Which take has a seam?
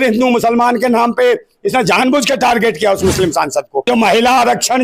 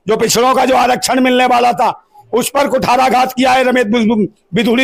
first; 1 cut; at 3.9 s

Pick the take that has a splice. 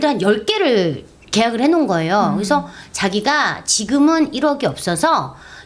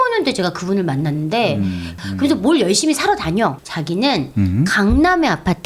second; 2 cuts; at 1.9 s, 3.6 s

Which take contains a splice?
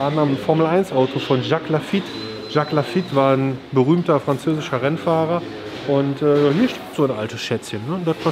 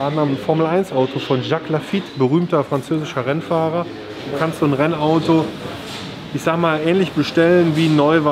second; 2 cuts; at 2.1 s, 4.3 s

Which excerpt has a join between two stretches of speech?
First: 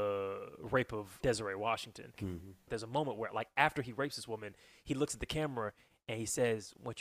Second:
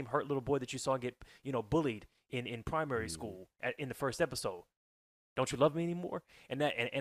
first; 2 cuts; at 1.1 s, 2.5 s

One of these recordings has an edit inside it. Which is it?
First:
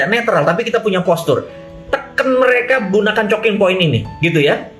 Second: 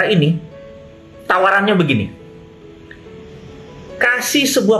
first; 1 cut; at 1.6 s

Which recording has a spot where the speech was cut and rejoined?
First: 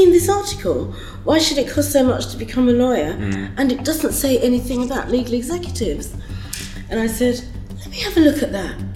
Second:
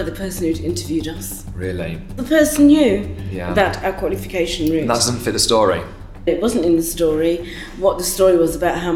second; 2 cuts; at 2.2 s, 6.3 s

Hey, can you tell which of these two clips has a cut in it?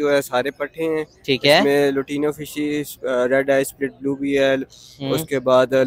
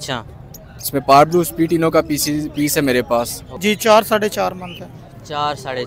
second; 1 cut; at 3.4 s

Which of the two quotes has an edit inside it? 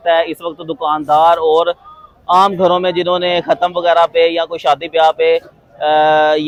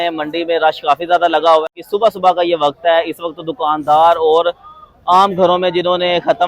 second; 1 cut; at 1.6 s

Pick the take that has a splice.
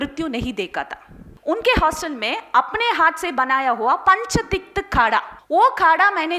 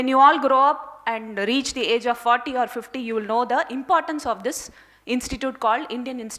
first; 2 cuts; at 1.3 s, 5.4 s

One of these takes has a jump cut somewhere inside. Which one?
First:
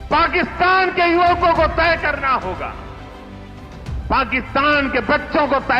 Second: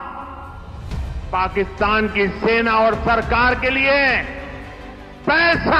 first; 2 cuts; at 2.7 s, 4.1 s

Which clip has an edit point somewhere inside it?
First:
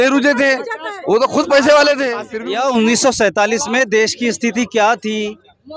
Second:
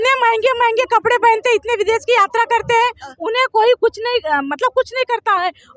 first; 1 cut; at 2.3 s

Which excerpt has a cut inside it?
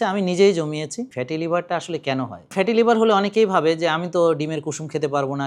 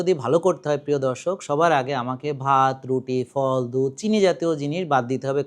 first; 2 cuts; at 1.1 s, 2.5 s

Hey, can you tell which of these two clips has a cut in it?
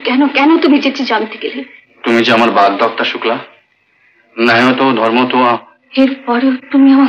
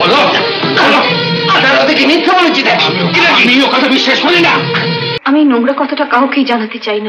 second; 1 cut; at 5.1 s

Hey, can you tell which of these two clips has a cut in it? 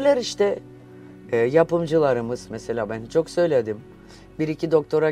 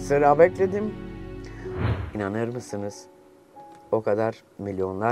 second; 1 cut; at 1.9 s

